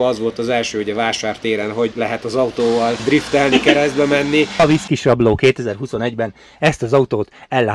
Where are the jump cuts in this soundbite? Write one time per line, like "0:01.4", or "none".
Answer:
0:01.9
0:03.0
0:04.6